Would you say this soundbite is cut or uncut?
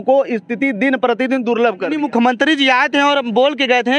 cut